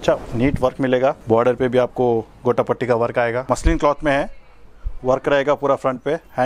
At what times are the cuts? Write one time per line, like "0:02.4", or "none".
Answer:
0:01.2
0:03.4